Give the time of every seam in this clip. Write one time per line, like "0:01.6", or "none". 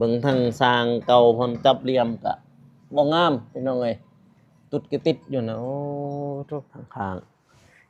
0:06.8